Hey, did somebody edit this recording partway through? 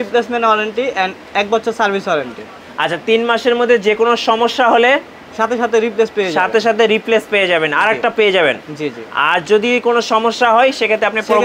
no; 0 cuts

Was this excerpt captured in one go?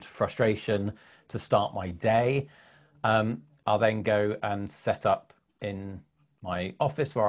yes; 0 cuts

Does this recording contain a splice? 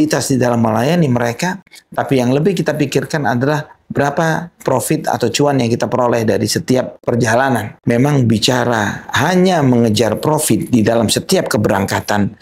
yes; 1 cut; at 7.4 s

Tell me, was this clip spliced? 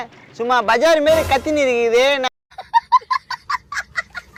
no; 0 cuts

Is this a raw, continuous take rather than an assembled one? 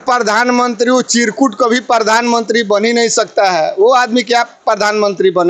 yes; 0 cuts

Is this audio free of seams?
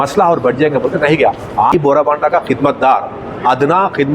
no; 1 cut; at 1.7 s

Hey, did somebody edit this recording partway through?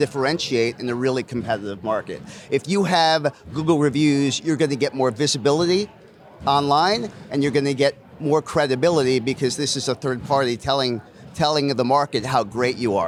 no; 0 cuts

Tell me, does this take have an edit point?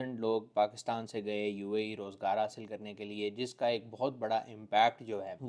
no; 0 cuts

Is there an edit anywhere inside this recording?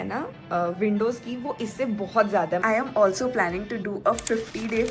yes; 1 cut; at 2.6 s

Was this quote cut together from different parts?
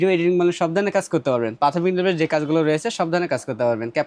no; 0 cuts

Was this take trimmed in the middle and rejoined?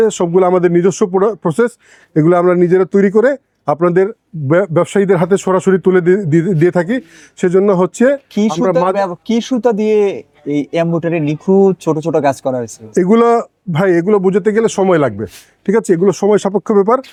no; 0 cuts

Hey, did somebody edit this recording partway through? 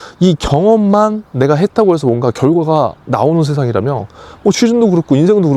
no; 0 cuts

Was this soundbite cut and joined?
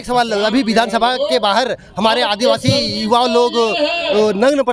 no; 0 cuts

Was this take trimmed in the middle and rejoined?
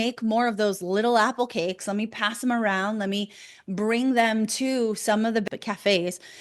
yes; 1 cut; at 5.4 s

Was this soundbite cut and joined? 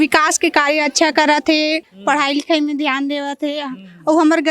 yes; 1 cut; at 1.8 s

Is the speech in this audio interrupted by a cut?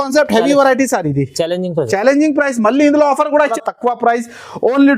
yes; 1 cut; at 3.5 s

